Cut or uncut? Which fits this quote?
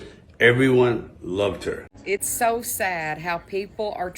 cut